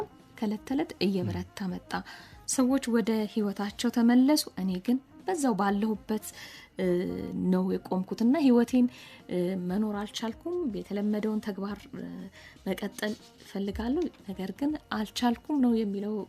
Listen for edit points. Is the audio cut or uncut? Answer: uncut